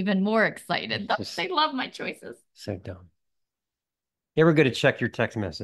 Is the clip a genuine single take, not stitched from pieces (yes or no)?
yes